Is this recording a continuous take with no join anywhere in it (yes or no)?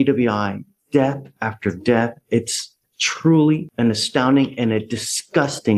yes